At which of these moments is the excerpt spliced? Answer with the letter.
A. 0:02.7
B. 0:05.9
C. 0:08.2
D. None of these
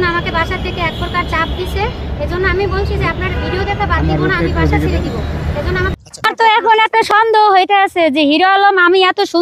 B